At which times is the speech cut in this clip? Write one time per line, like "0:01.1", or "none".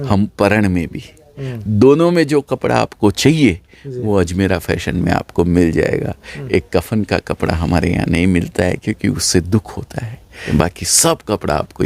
0:10.4